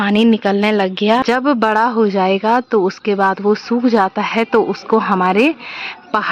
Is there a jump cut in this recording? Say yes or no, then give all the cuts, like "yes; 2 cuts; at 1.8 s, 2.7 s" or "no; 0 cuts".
yes; 1 cut; at 1.2 s